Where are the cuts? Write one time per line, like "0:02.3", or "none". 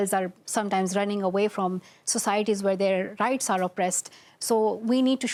none